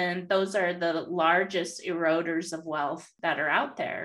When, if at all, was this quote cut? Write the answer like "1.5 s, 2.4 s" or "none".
3.1 s